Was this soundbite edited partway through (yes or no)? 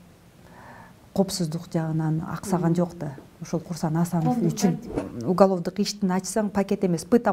yes